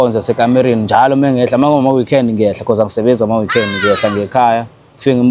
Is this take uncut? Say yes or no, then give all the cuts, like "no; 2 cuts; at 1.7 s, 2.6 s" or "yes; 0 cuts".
yes; 0 cuts